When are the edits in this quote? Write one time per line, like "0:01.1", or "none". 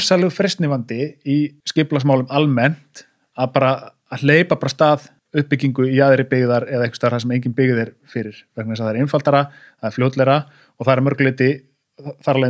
0:01.6
0:05.2